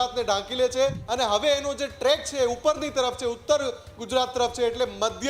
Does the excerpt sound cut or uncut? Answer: cut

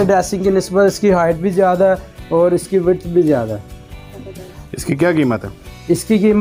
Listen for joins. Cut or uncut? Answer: uncut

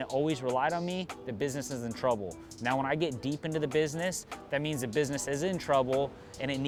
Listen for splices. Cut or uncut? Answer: uncut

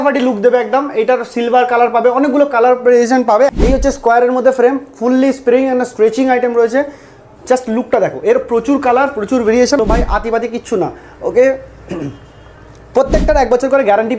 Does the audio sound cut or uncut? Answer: cut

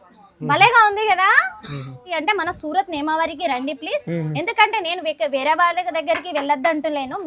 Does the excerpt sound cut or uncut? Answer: cut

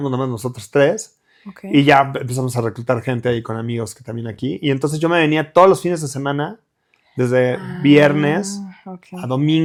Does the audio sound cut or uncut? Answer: uncut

